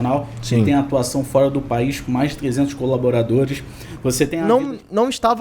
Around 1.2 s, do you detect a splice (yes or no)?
no